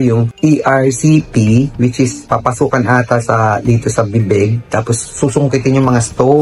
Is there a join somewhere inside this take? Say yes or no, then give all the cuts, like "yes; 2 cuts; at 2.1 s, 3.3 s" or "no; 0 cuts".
no; 0 cuts